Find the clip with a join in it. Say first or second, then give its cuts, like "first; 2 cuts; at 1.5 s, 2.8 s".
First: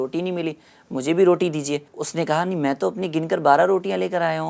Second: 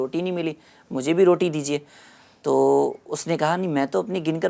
first; 1 cut; at 2.0 s